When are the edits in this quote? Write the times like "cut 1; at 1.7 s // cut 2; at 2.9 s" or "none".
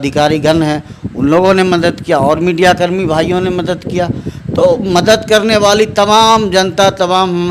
none